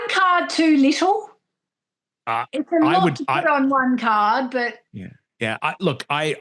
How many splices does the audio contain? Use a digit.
0